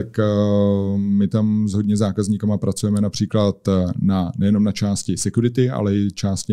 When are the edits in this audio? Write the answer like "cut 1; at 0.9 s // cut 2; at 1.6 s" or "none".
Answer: none